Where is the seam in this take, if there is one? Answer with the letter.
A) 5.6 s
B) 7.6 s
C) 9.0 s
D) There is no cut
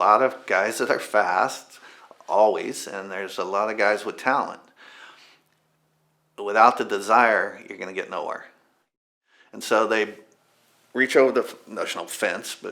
C